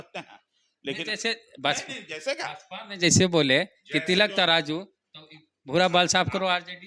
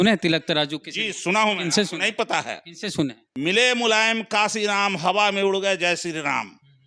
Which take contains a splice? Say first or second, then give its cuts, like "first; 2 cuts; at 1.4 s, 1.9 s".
second; 1 cut; at 3.2 s